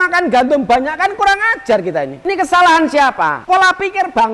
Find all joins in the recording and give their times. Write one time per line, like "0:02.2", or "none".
0:02.1
0:03.4